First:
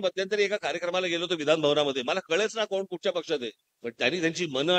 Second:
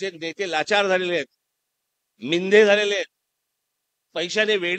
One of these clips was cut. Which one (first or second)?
first